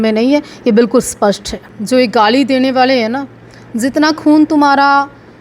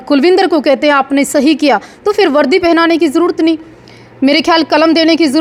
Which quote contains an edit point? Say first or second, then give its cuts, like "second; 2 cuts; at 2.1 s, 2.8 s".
first; 1 cut; at 1.7 s